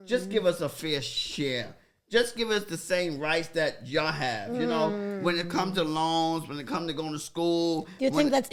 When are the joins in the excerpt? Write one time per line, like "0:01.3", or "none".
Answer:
none

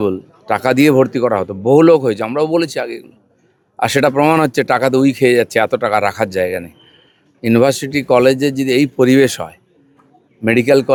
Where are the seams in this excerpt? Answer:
none

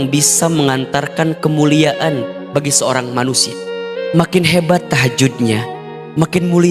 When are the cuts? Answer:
none

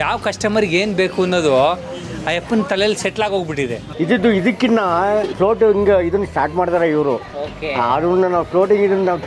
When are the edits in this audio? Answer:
0:03.8
0:05.3

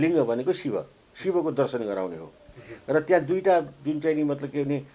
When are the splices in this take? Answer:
none

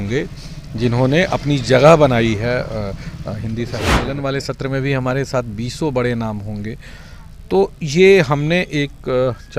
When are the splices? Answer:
0:04.0

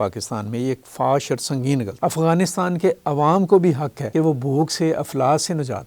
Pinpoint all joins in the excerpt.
0:01.9

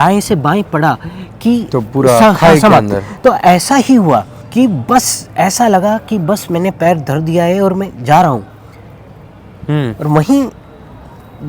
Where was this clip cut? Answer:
0:04.4

